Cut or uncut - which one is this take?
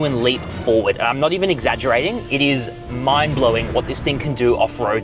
uncut